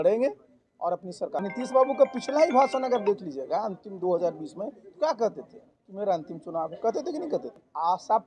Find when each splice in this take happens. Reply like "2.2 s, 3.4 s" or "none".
1.4 s, 7.3 s